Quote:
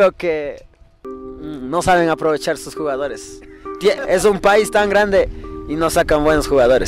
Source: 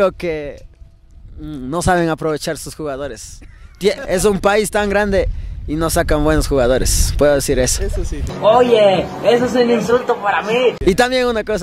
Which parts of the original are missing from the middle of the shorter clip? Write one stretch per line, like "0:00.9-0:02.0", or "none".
none